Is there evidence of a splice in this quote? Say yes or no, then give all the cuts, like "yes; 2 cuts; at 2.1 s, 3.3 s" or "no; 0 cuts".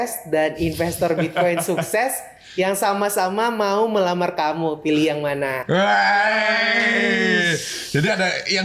no; 0 cuts